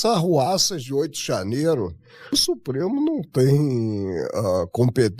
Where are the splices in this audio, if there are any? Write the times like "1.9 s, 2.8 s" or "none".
2.3 s